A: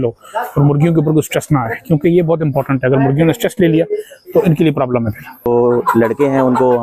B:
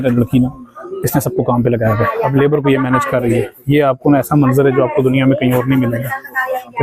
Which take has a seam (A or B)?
A